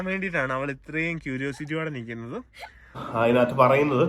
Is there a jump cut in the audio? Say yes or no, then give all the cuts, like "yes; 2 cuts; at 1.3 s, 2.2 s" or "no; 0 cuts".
yes; 1 cut; at 3.0 s